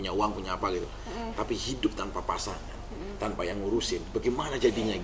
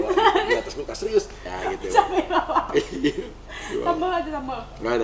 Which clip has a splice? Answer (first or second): second